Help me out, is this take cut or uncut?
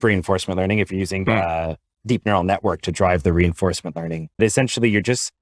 cut